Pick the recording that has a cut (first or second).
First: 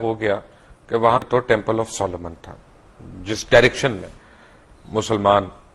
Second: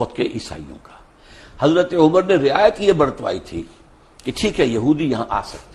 first